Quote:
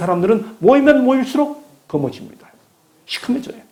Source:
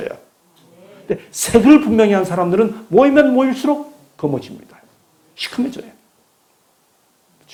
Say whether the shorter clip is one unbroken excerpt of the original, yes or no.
yes